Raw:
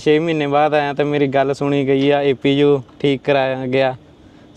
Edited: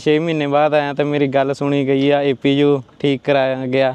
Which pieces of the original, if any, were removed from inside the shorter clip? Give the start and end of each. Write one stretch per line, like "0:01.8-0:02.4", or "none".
none